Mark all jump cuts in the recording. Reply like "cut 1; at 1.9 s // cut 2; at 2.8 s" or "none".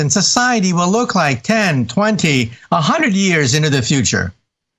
none